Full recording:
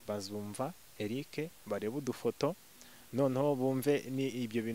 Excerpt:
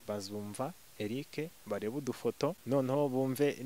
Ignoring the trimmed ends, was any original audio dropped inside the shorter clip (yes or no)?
yes